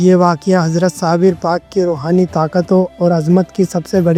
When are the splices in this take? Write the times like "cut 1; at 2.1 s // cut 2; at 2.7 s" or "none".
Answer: none